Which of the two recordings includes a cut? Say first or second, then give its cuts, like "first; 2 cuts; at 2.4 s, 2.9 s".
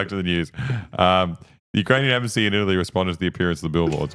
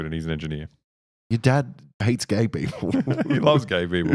second; 1 cut; at 2.0 s